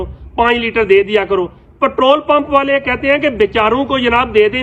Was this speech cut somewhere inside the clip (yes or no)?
no